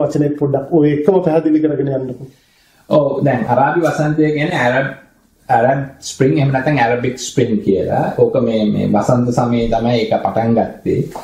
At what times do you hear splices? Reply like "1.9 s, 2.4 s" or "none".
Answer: none